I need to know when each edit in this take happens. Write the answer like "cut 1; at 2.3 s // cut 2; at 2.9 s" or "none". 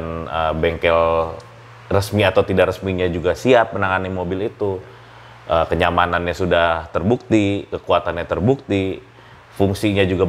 none